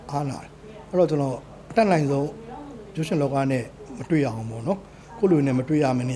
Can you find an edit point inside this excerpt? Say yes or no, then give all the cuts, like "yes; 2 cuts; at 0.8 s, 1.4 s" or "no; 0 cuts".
no; 0 cuts